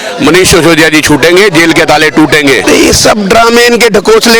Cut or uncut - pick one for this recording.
uncut